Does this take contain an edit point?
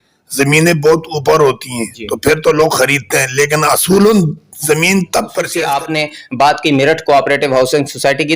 yes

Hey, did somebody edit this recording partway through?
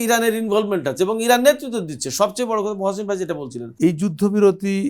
yes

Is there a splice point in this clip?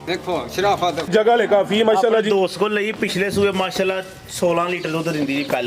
yes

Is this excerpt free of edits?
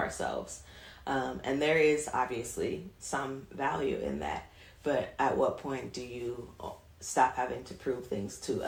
yes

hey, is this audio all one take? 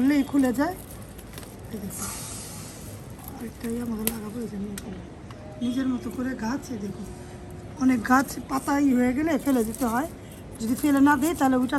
yes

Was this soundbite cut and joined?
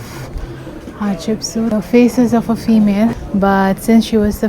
yes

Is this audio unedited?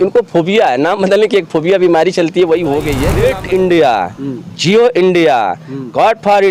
no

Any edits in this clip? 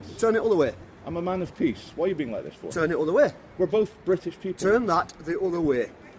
no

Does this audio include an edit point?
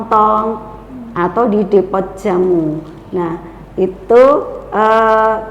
no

